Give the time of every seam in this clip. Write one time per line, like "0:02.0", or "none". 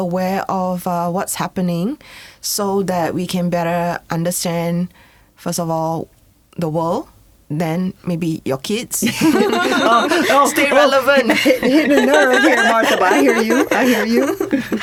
none

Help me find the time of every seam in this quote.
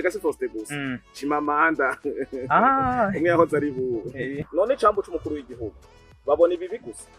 0:04.4

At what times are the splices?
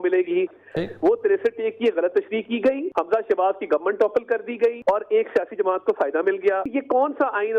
0:02.9
0:04.8
0:06.6

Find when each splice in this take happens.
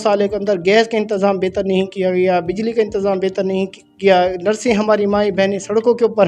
none

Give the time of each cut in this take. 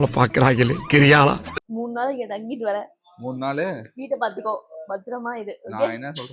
0:01.6

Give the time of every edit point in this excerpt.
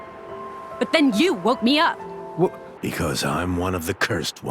0:02.7

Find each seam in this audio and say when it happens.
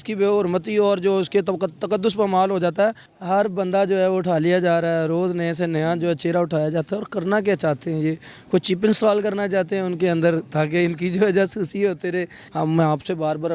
0:03.1
0:12.4

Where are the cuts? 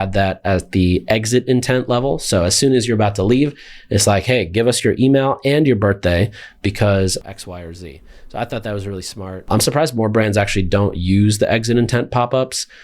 0:07.2
0:09.5

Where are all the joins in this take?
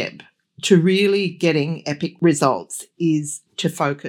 none

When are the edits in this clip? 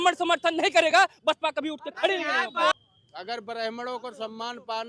0:02.7

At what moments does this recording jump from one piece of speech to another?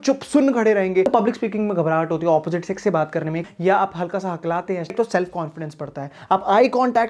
0:01.1
0:03.5
0:04.9

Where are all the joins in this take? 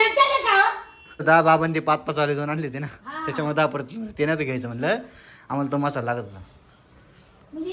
0:01.2

